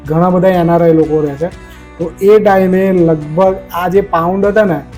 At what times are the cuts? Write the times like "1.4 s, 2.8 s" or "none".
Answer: none